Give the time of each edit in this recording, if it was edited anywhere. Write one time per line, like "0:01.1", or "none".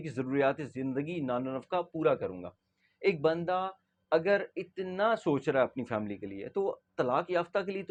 none